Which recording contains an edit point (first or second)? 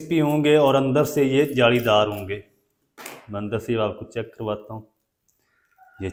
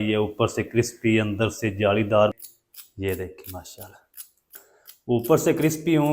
second